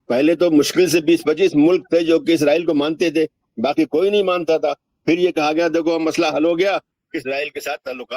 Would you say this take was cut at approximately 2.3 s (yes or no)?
no